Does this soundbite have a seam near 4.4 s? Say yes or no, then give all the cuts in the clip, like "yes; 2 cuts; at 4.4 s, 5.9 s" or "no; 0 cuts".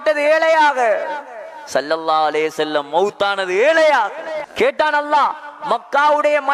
yes; 1 cut; at 4.4 s